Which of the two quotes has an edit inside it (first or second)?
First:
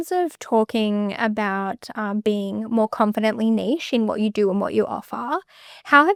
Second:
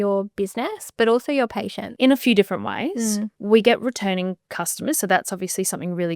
second